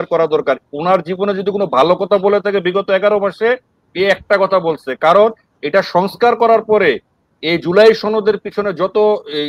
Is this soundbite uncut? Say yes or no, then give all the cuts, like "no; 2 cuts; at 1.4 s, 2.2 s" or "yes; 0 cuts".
yes; 0 cuts